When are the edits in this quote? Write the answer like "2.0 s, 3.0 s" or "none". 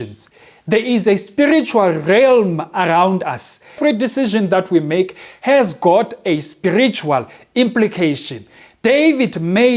3.8 s